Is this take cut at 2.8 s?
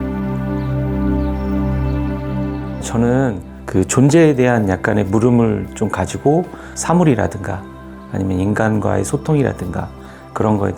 yes; 1 cut; at 2.8 s

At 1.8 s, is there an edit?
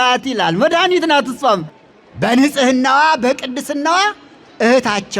yes; 1 cut; at 1.8 s

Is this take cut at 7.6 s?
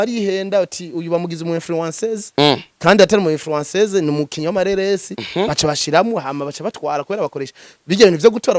no; 0 cuts

